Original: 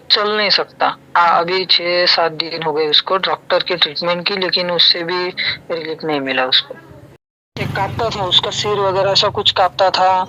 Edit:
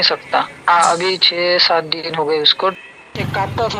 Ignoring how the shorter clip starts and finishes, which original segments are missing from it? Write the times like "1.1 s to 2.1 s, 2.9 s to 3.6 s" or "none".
3.2 s to 7.2 s